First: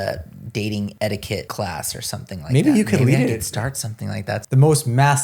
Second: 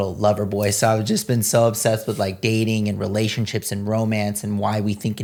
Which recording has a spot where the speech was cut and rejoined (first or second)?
first